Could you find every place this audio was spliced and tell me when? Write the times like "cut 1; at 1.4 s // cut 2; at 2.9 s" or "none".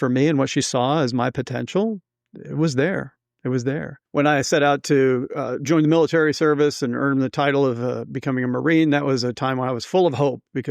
cut 1; at 3.9 s